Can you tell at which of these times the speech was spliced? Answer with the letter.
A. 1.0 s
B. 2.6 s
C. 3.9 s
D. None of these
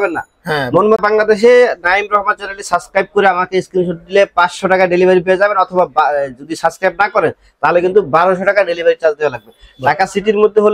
A